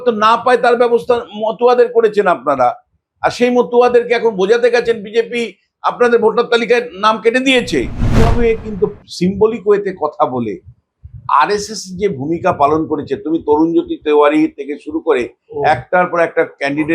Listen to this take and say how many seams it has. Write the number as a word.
one